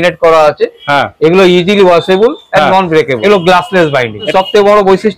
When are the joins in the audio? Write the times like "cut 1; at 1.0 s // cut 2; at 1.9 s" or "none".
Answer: cut 1; at 3.2 s // cut 2; at 4.3 s